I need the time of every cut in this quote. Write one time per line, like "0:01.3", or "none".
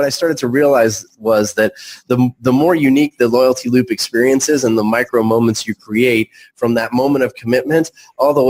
none